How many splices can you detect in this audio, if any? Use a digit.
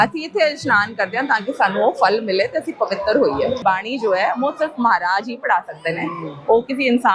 1